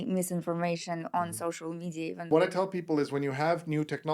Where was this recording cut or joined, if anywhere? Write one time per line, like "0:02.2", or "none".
0:02.3